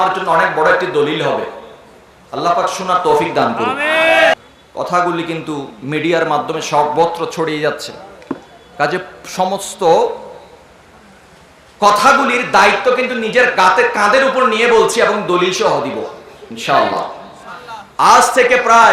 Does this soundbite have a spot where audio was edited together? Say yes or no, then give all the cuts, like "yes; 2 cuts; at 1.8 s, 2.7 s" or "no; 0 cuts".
yes; 1 cut; at 4.3 s